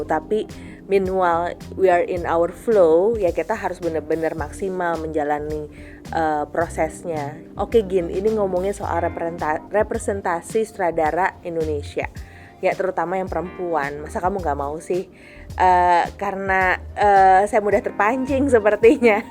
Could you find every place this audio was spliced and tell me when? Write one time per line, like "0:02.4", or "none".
0:07.4